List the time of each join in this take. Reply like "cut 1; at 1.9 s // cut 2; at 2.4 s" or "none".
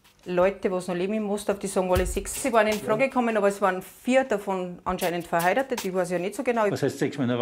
cut 1; at 2.4 s // cut 2; at 6.7 s